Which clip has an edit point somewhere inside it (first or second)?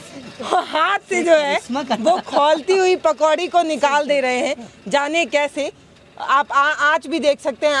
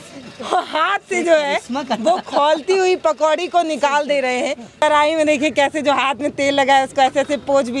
second